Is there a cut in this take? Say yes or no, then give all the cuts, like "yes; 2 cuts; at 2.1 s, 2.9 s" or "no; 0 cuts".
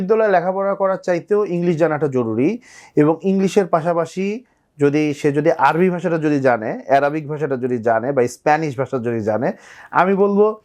no; 0 cuts